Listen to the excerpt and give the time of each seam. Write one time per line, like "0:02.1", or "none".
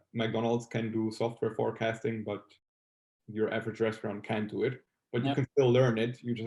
none